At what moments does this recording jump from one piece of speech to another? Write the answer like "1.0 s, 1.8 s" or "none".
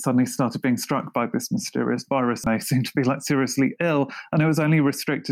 2.5 s